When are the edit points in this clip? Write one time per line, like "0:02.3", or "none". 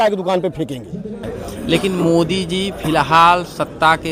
0:01.2